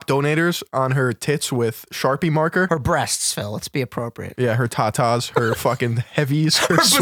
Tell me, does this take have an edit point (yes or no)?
yes